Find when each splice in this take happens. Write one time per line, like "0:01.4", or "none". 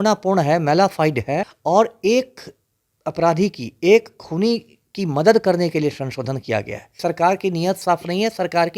0:01.5
0:06.9